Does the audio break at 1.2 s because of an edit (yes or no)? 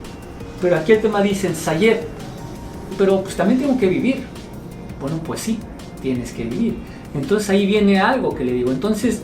no